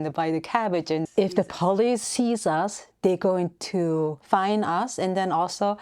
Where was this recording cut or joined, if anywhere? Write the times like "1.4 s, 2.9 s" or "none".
1.1 s, 4.2 s